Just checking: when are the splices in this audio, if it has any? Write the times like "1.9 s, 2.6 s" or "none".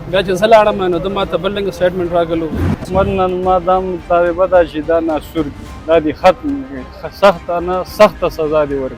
2.5 s